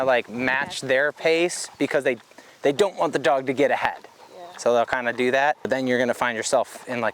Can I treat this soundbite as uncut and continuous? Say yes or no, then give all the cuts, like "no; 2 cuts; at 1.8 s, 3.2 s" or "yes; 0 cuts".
no; 1 cut; at 5.6 s